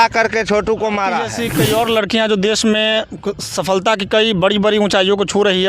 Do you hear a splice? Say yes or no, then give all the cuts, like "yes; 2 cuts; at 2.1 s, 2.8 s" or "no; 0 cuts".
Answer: yes; 1 cut; at 1.4 s